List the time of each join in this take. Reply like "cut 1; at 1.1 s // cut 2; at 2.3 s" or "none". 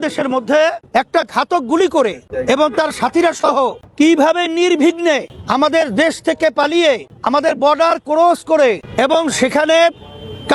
cut 1; at 0.8 s // cut 2; at 2.3 s // cut 3; at 3.8 s // cut 4; at 5.4 s // cut 5; at 7.1 s // cut 6; at 8.8 s